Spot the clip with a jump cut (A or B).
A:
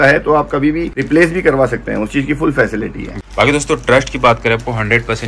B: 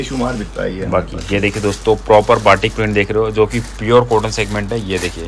A